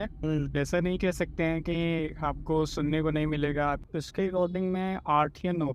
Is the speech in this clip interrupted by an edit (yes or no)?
yes